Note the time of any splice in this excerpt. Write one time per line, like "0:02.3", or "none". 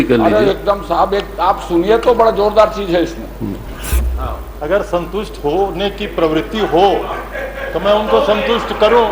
0:04.0